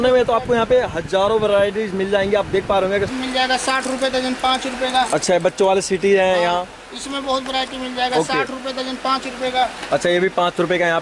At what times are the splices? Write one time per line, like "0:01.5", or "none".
0:03.1